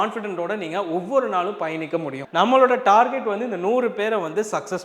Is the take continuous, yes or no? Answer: no